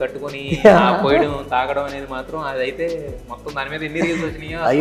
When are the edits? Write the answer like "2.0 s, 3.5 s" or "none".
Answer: none